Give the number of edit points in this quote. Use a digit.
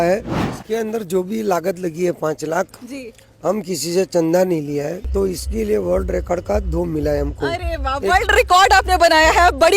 1